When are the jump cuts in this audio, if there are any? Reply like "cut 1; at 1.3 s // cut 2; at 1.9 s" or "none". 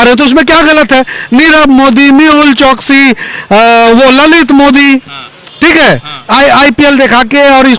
none